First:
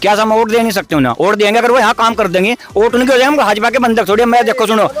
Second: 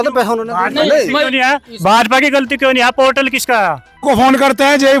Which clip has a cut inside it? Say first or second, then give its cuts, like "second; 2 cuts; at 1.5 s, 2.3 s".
second; 1 cut; at 4.0 s